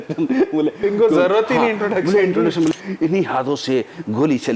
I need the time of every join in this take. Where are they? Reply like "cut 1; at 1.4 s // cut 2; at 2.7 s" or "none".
cut 1; at 2.7 s